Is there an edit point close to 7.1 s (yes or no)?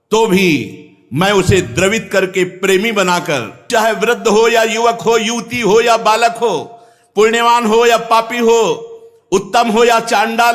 no